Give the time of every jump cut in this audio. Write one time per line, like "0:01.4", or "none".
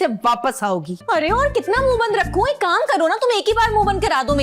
0:00.9